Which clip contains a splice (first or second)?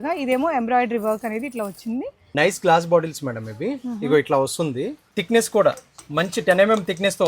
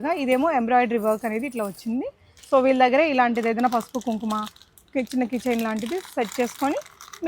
first